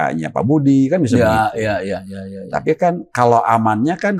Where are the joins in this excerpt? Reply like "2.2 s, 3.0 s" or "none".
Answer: none